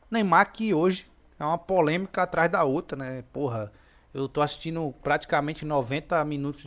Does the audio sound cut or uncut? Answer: uncut